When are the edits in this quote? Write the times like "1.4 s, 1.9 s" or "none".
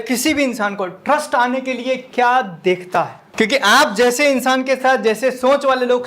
3.2 s